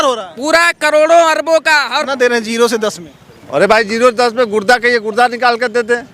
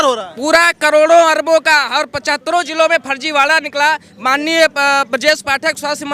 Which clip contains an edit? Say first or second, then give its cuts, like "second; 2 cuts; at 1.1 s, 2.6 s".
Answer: first; 1 cut; at 2.0 s